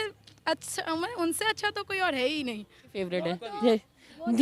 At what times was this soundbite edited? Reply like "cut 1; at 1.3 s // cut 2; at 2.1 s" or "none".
cut 1; at 2.9 s